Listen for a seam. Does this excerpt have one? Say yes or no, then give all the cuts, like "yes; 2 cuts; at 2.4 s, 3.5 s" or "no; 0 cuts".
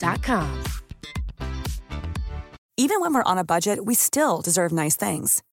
yes; 1 cut; at 2.6 s